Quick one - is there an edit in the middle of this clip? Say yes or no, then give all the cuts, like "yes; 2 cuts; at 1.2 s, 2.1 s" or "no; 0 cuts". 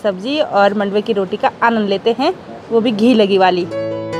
no; 0 cuts